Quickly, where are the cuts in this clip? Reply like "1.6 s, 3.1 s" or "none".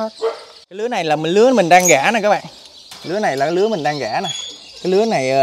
0.9 s